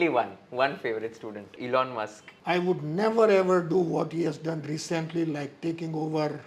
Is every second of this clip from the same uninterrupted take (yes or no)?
no